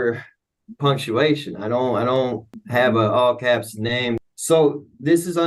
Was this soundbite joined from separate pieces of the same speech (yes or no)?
yes